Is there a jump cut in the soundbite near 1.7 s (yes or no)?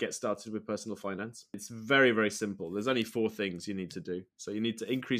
yes